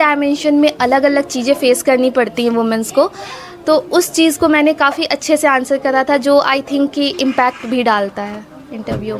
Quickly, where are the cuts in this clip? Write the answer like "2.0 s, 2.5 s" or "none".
none